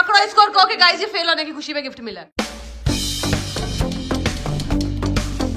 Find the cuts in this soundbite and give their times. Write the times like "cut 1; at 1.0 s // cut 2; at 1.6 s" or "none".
cut 1; at 2.3 s

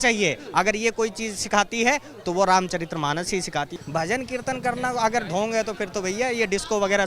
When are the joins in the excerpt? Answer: cut 1; at 3.7 s

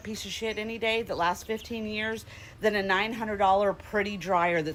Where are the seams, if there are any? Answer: none

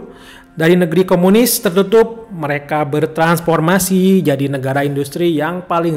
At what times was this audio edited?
none

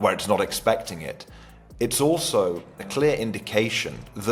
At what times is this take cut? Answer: none

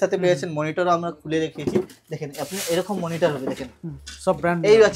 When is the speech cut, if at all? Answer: none

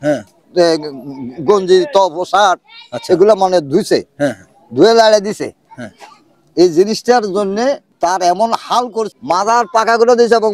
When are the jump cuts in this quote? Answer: cut 1; at 7.9 s // cut 2; at 9.1 s

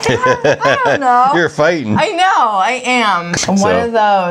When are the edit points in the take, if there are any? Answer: cut 1; at 3.3 s

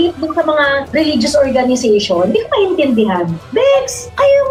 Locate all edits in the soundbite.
none

